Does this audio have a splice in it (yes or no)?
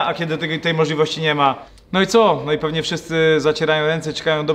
yes